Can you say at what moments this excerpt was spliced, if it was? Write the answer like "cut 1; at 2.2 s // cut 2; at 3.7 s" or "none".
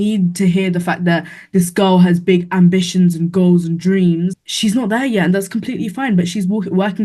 cut 1; at 4.4 s